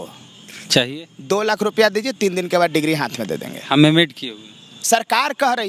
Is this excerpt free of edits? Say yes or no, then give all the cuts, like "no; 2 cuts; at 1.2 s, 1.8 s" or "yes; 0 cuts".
no; 1 cut; at 4.8 s